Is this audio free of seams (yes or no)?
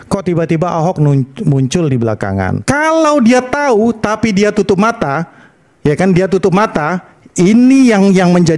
no